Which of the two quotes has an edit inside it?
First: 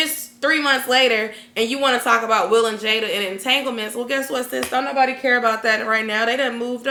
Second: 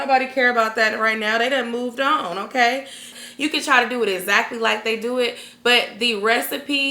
second; 1 cut; at 3.1 s

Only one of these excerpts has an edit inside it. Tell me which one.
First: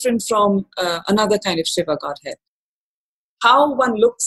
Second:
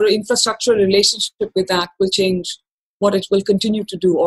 first; 1 cut; at 2.8 s

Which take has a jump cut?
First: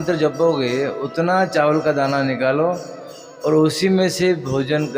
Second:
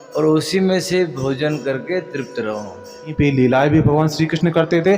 second; 1 cut; at 3.1 s

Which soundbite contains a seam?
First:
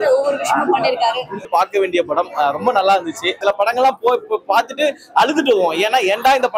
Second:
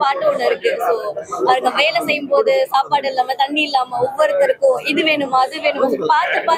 first; 2 cuts; at 1.4 s, 3.4 s

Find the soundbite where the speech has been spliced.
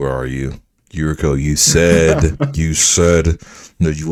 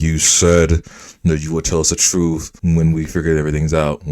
second; 1 cut; at 2.5 s

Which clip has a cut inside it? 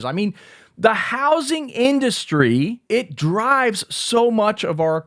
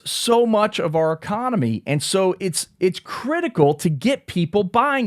first; 1 cut; at 2.8 s

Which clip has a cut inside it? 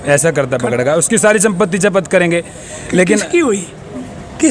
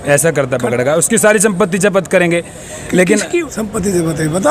second; 1 cut; at 3.4 s

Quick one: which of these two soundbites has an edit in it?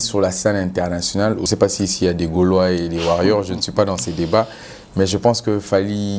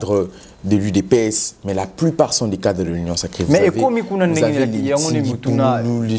first; 1 cut; at 1.4 s

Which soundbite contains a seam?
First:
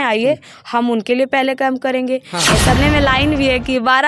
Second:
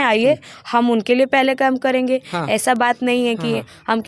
first; 1 cut; at 2.8 s

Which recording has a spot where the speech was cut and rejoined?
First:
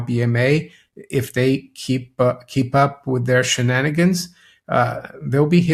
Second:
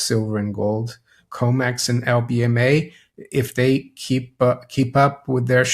second; 1 cut; at 1.2 s

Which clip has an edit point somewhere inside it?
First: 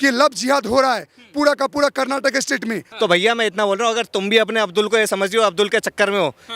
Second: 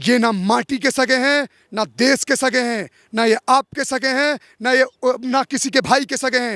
first; 1 cut; at 2.9 s

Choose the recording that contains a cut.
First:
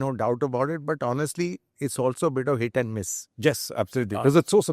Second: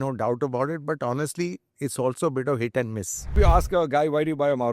second; 1 cut; at 3.3 s

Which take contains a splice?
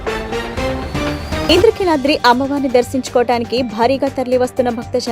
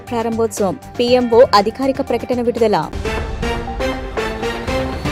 first; 1 cut; at 1.5 s

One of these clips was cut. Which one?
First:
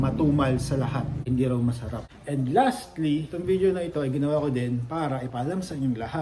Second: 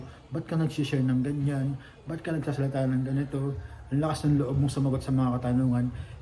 first; 3 cuts; at 1.2 s, 2.0 s, 3.3 s

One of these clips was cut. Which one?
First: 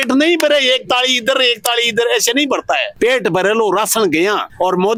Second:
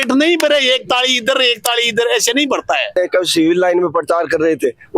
second; 1 cut; at 2.9 s

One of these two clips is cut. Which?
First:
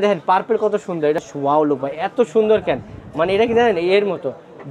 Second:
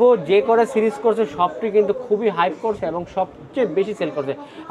first; 1 cut; at 1.2 s

